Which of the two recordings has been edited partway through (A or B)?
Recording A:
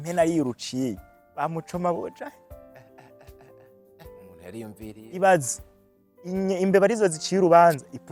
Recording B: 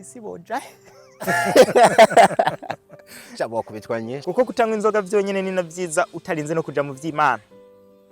B